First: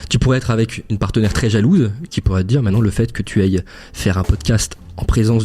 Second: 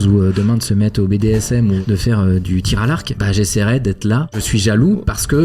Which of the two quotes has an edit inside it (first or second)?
second